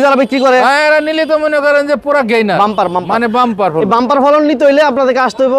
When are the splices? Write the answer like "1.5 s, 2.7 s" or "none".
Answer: none